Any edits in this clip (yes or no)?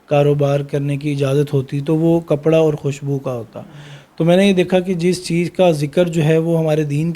no